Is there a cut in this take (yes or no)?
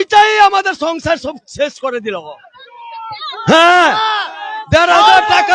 no